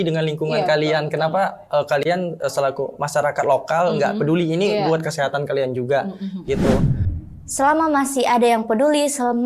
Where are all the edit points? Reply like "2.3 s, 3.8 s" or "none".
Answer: 7.0 s